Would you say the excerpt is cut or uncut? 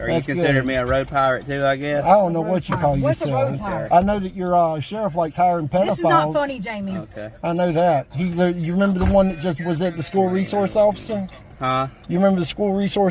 uncut